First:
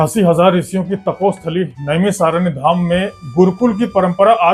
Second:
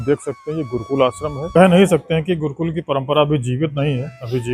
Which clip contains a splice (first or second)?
second